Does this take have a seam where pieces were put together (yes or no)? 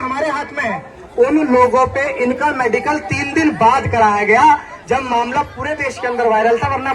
yes